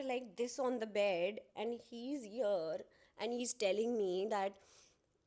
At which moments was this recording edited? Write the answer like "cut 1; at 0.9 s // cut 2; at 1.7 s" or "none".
none